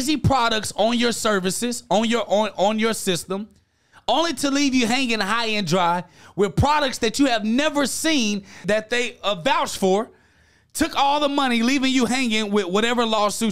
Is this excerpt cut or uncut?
cut